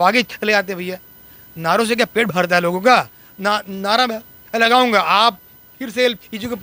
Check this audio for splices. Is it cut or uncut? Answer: uncut